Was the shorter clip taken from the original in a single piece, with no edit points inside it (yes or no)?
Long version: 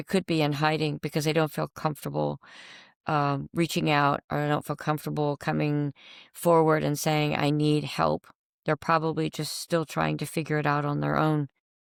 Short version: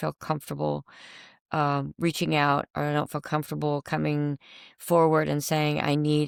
yes